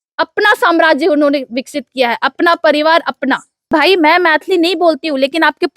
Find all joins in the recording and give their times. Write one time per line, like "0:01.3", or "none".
0:03.7